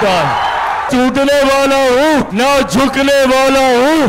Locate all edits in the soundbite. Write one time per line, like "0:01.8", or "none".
0:00.9
0:02.3